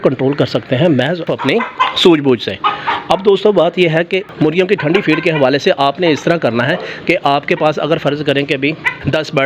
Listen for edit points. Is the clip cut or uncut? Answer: uncut